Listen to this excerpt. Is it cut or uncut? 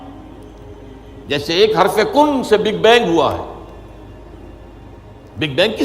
uncut